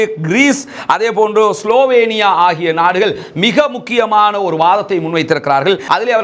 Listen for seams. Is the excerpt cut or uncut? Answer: uncut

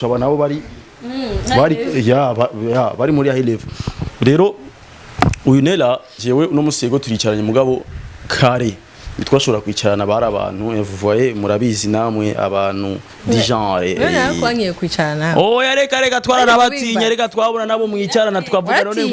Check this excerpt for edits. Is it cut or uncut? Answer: uncut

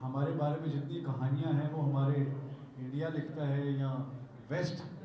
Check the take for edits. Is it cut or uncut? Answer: uncut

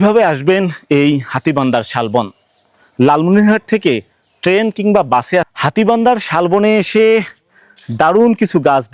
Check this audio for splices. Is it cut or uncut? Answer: cut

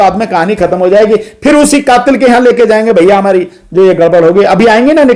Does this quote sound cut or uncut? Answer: uncut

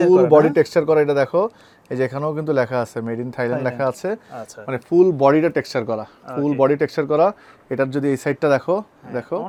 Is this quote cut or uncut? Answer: uncut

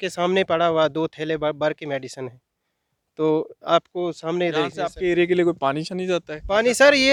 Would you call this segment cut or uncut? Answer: uncut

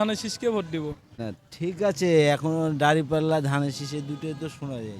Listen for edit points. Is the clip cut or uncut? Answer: cut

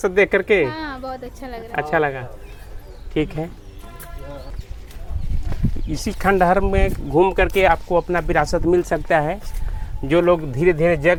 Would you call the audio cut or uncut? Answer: uncut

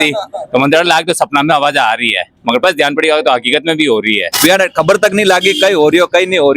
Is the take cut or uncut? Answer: cut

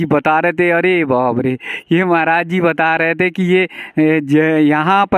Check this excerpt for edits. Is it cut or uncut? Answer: uncut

